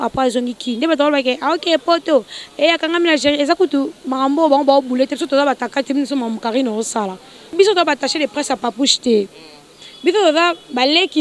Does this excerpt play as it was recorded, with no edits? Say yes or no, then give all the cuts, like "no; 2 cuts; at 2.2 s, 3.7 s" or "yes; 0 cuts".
no; 1 cut; at 7.5 s